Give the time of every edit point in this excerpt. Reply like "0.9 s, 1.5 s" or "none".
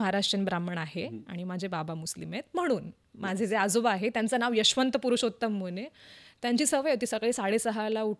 none